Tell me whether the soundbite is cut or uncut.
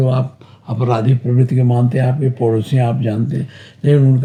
uncut